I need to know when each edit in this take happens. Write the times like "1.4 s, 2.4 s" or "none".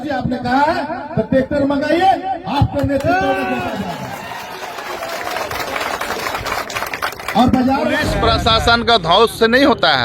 8.1 s